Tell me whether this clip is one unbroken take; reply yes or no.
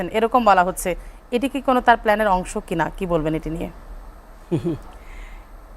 yes